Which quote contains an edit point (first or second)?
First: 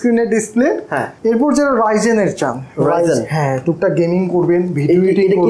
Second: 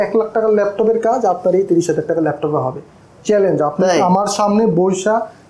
first